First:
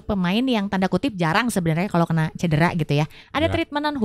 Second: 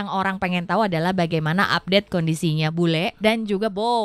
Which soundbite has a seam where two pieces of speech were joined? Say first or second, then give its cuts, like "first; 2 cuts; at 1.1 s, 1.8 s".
second; 1 cut; at 3.1 s